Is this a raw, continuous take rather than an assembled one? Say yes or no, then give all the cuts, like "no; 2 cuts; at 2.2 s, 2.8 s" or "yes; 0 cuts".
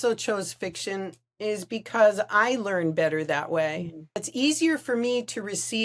no; 1 cut; at 4.3 s